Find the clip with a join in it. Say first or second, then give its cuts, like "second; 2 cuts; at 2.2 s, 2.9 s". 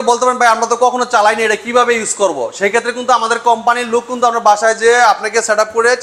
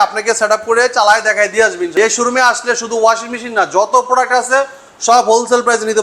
second; 1 cut; at 1.9 s